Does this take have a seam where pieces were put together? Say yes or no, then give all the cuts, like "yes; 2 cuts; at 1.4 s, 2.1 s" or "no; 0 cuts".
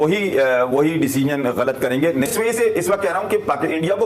yes; 1 cut; at 2.3 s